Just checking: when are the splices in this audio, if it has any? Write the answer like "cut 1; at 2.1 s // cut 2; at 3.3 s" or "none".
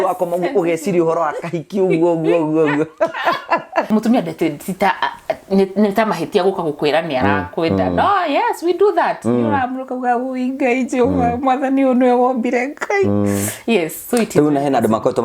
cut 1; at 3.9 s